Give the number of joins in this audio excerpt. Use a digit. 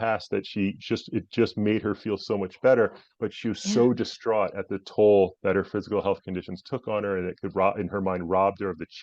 0